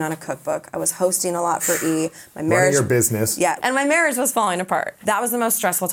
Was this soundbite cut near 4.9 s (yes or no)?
yes